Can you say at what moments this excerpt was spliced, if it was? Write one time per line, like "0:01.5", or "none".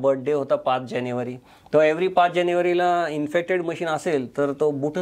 none